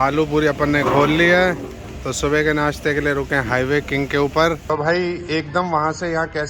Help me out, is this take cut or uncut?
cut